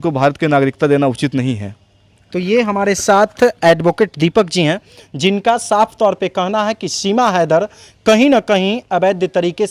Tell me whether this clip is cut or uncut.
uncut